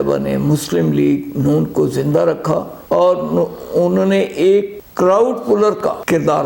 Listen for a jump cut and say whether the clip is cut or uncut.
uncut